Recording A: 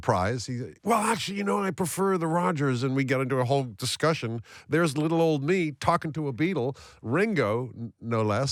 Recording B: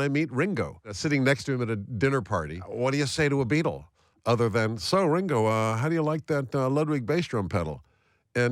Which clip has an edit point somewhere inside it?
B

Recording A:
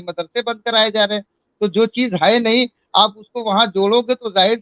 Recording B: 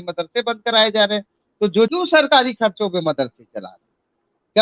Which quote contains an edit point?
B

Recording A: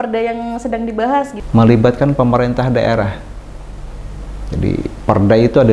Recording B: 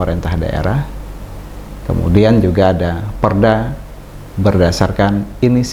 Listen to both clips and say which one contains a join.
A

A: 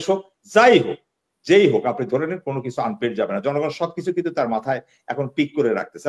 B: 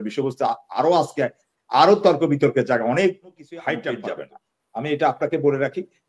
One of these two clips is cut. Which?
B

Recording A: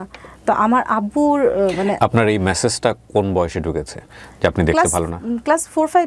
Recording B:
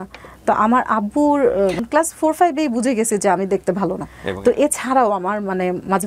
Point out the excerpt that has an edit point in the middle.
B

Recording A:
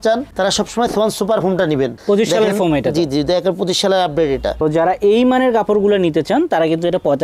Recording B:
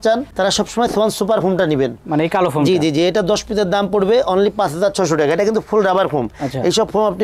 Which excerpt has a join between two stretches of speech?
A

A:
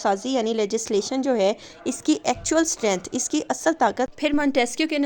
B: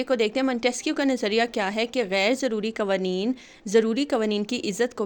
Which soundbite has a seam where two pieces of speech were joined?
A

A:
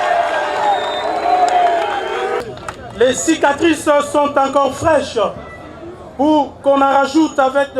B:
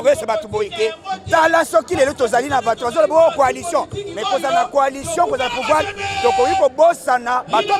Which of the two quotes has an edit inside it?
A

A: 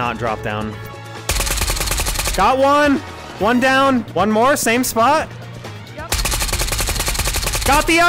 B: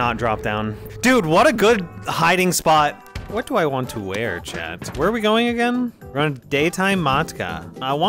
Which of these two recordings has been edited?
A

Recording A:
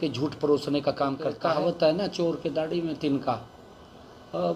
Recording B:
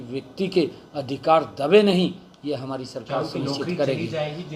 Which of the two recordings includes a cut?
A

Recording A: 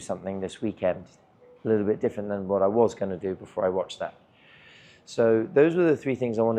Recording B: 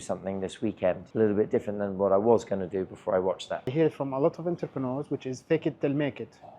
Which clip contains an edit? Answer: B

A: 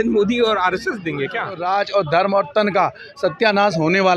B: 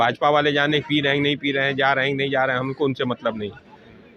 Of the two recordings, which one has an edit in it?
A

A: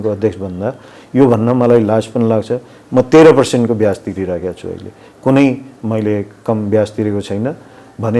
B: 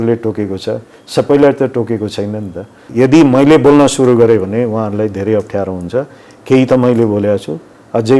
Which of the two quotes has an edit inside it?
B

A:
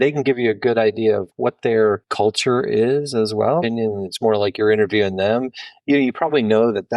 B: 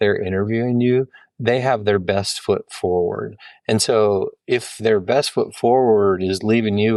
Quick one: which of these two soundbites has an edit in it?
A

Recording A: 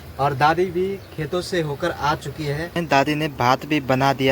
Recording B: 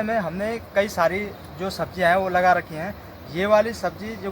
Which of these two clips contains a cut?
A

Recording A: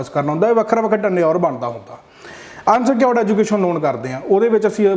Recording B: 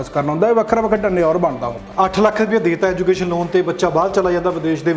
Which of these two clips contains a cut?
B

